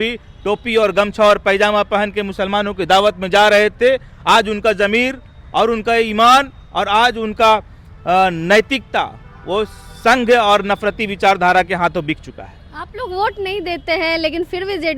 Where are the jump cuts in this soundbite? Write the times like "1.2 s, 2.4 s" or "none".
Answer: none